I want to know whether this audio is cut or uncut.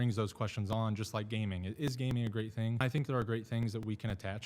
cut